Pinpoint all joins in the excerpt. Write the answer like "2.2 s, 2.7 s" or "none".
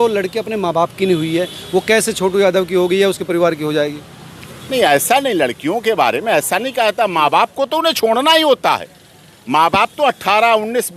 none